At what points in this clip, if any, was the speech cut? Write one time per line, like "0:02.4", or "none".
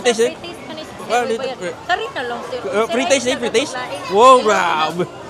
none